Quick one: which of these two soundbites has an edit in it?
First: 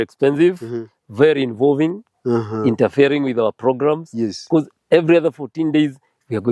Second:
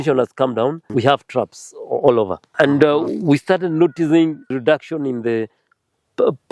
second; 3 cuts; at 0.8 s, 2.5 s, 4.6 s

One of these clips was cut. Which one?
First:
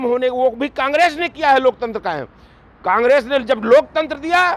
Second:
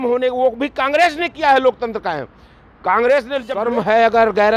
second; 1 cut; at 3.4 s

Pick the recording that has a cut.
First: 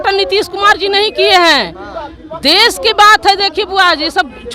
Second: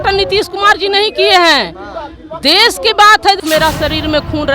second; 1 cut; at 3.4 s

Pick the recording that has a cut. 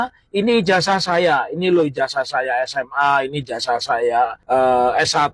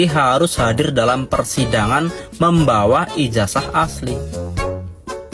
first; 1 cut; at 4.4 s

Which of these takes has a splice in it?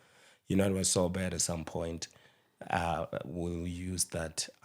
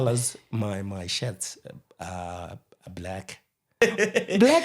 second; 1 cut; at 3.7 s

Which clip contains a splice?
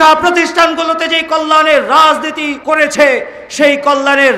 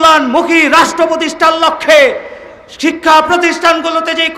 first; 1 cut; at 2.5 s

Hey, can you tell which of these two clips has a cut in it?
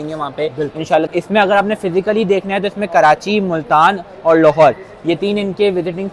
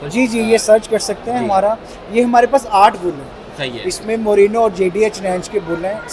first; 1 cut; at 1.1 s

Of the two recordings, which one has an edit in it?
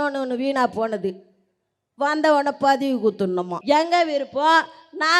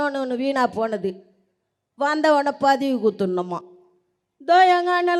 first; 1 cut; at 3.5 s

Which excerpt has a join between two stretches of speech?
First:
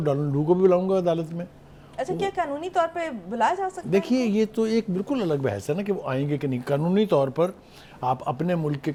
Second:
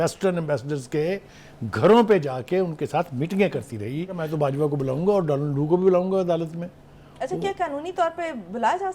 second; 1 cut; at 4.2 s

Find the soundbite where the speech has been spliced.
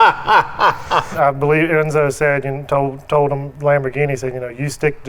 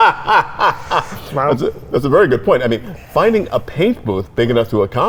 first; 1 cut; at 1.1 s

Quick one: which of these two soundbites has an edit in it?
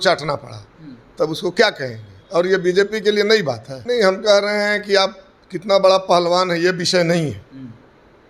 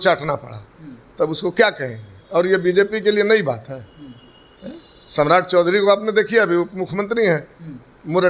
first; 1 cut; at 3.7 s

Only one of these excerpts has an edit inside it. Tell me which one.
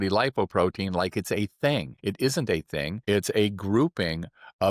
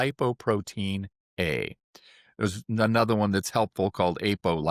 first; 2 cuts; at 1.9 s, 2.9 s

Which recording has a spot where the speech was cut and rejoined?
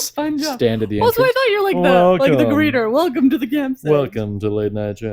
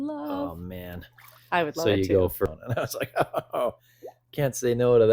second; 1 cut; at 2.4 s

